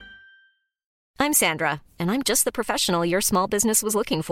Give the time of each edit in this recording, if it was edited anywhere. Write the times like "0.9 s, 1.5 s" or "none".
0.9 s